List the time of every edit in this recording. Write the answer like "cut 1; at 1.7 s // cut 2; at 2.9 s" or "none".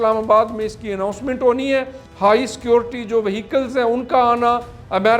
cut 1; at 2.0 s